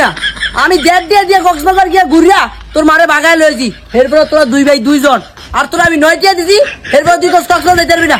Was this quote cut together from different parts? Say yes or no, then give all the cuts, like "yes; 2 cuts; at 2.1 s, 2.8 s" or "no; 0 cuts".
no; 0 cuts